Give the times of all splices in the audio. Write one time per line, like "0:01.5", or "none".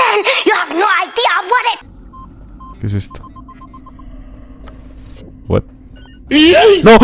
none